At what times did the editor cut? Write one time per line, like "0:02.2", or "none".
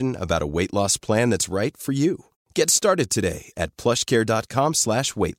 none